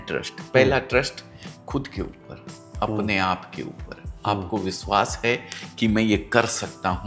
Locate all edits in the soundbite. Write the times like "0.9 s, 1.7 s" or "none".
none